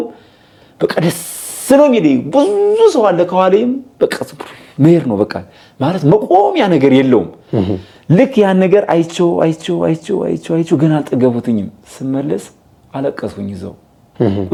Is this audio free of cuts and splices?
yes; 0 cuts

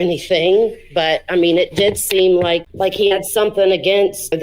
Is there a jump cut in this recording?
yes; 1 cut; at 2.7 s

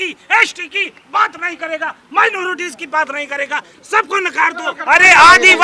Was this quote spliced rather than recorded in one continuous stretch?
yes; 1 cut; at 4.7 s

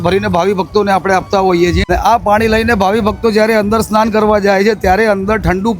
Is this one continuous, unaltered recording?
no; 1 cut; at 1.9 s

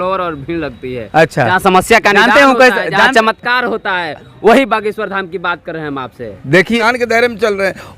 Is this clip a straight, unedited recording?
no; 1 cut; at 6.8 s

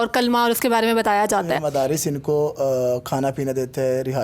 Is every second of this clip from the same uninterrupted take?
no; 1 cut; at 1.6 s

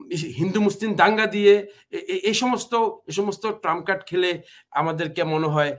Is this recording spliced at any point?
no; 0 cuts

